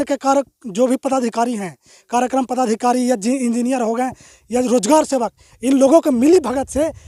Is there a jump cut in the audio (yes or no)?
no